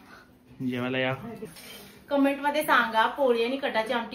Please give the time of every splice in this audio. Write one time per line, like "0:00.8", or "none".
0:01.5